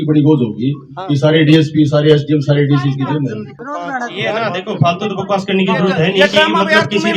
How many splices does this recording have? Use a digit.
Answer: 1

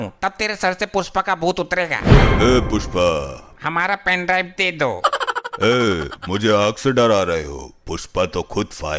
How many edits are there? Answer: 1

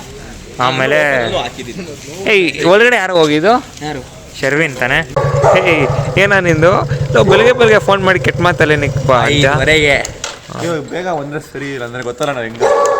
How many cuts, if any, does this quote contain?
1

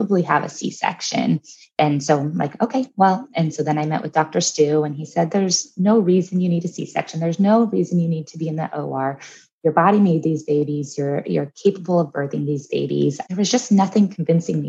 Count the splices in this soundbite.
1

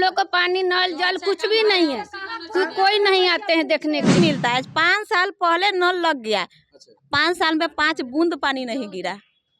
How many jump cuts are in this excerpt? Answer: 1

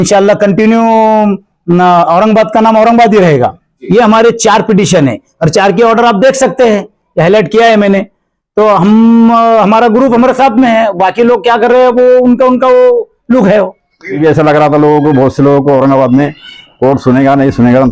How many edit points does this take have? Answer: 2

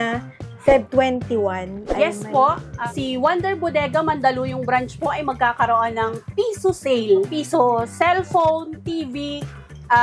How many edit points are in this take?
2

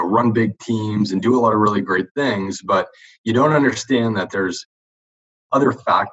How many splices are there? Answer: 0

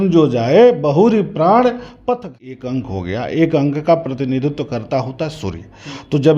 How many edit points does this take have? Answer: 1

